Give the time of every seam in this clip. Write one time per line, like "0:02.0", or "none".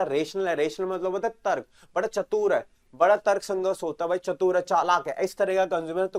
none

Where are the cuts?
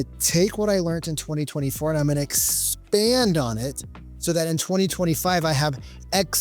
none

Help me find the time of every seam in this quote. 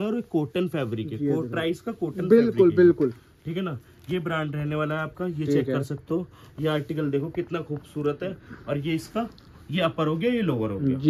none

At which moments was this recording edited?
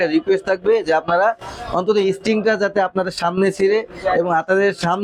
none

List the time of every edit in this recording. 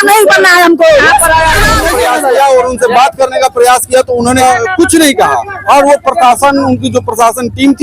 0:01.8
0:04.4

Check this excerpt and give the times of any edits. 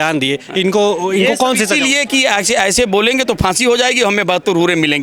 none

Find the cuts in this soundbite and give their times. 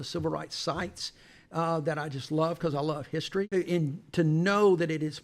0:03.5

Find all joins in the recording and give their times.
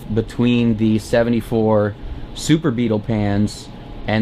none

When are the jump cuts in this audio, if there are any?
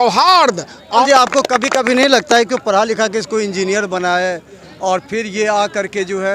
0:01.0

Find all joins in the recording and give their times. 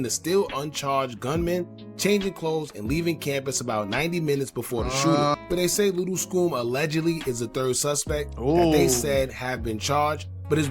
0:05.4

